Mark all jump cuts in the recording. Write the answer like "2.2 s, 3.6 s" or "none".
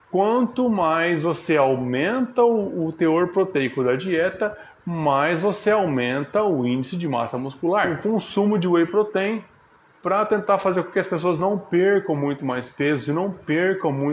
7.9 s